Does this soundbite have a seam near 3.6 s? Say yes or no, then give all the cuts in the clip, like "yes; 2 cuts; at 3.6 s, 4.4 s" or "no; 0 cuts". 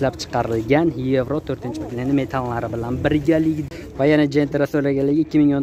yes; 1 cut; at 3.6 s